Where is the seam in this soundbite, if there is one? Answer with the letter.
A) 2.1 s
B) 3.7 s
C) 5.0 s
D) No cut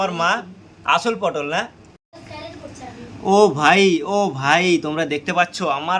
A